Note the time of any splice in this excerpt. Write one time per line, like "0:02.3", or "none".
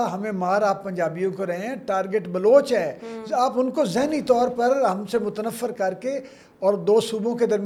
none